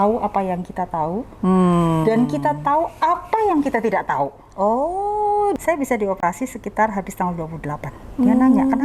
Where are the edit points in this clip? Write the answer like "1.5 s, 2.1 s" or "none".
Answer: 5.6 s